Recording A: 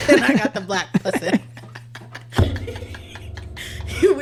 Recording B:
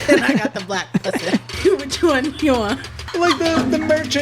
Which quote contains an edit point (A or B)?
B